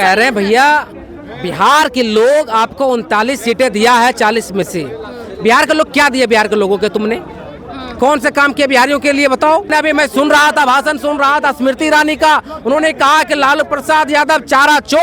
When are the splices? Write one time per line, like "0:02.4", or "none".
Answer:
0:09.7